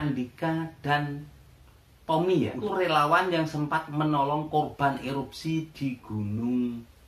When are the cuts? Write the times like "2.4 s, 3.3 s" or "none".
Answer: 2.6 s